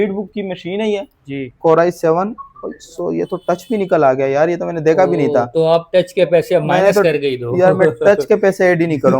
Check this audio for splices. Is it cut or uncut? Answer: cut